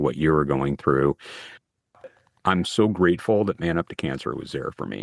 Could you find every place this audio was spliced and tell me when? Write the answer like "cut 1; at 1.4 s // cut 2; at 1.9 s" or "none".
cut 1; at 1.9 s